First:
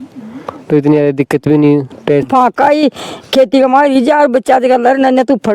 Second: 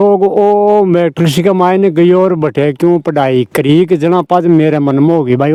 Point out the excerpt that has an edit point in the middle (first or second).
first